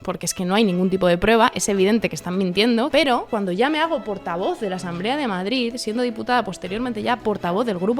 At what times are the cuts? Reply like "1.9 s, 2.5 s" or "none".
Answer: 3.1 s